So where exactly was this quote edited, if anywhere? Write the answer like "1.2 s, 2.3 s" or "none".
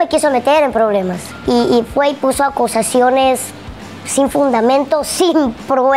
1.2 s